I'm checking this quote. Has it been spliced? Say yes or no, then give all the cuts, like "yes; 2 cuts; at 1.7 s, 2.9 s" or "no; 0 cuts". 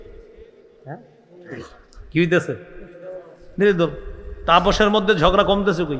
no; 0 cuts